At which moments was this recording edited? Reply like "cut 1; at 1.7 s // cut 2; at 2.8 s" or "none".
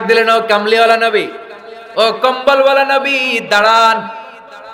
none